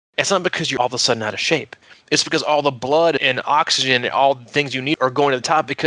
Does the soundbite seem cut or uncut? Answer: cut